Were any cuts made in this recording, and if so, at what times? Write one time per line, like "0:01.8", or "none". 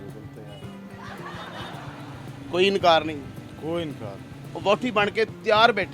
none